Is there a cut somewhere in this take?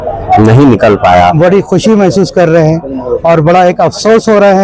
yes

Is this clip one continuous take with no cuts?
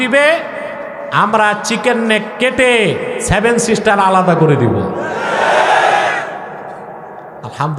yes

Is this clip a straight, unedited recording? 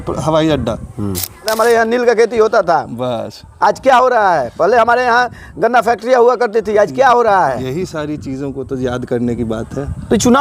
no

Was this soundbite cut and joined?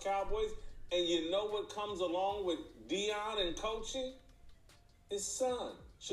no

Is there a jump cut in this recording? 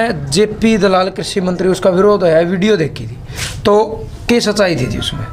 no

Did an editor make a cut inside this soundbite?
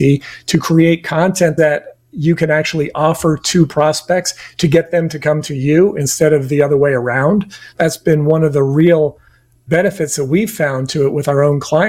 yes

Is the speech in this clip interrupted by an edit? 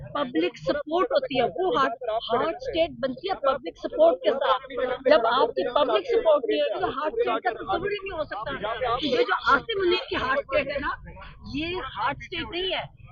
no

